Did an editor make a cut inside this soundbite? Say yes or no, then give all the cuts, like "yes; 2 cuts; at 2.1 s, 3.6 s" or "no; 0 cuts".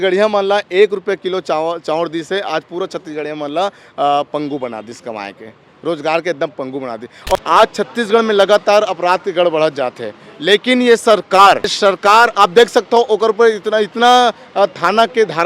yes; 2 cuts; at 7.4 s, 11.7 s